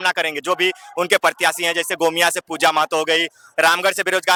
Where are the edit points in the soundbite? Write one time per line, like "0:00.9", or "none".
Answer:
none